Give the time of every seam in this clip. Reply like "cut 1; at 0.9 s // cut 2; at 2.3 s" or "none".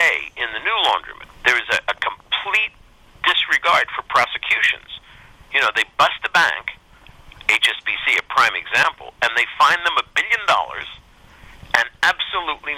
cut 1; at 1.2 s